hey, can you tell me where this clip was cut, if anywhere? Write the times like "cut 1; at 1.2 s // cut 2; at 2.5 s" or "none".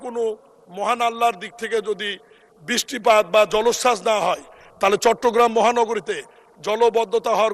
none